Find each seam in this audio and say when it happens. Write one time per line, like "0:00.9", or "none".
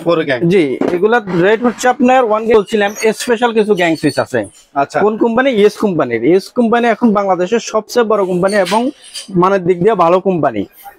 0:02.7